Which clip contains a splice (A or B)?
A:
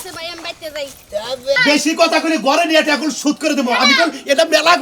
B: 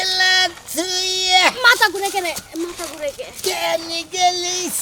A